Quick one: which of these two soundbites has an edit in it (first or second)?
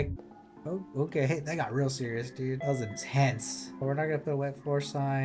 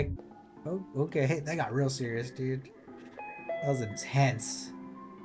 first